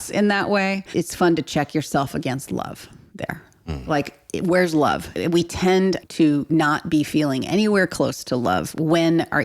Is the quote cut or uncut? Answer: cut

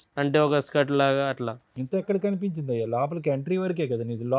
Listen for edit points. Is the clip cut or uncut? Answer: uncut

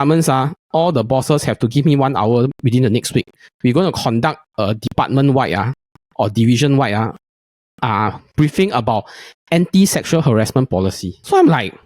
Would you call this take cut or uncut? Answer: uncut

